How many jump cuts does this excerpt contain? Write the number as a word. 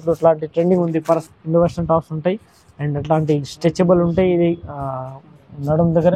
one